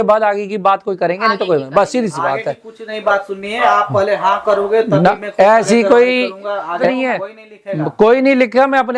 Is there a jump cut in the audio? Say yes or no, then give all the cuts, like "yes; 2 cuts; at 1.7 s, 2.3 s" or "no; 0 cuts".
yes; 1 cut; at 6.8 s